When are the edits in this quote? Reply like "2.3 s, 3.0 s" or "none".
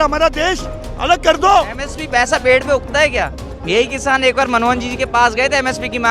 1.9 s